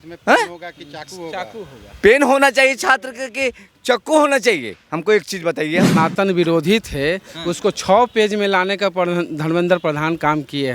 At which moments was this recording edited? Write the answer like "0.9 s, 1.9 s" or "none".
5.9 s